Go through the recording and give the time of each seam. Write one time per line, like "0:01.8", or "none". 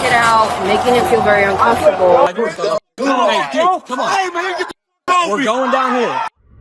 0:02.3